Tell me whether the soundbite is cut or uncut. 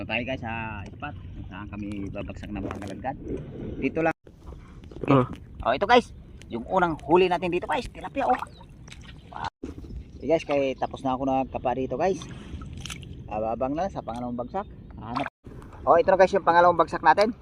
cut